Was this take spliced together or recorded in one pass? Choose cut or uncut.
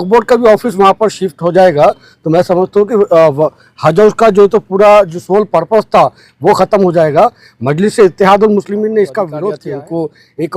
cut